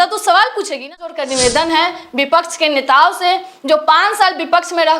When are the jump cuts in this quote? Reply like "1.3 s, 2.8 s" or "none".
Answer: 1.1 s